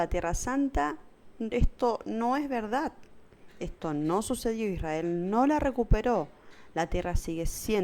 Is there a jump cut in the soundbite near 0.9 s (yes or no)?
no